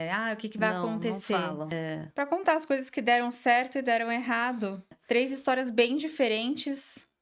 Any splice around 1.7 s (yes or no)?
yes